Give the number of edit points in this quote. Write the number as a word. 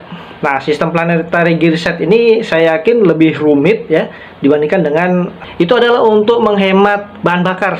one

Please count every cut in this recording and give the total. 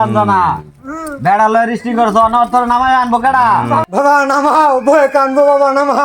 one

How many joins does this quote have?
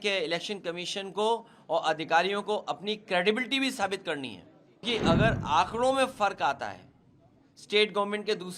one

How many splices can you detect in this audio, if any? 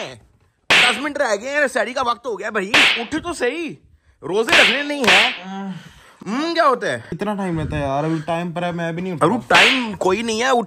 zero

